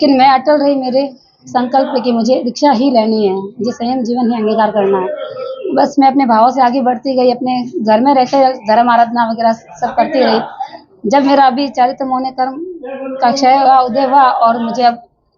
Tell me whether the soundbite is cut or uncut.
uncut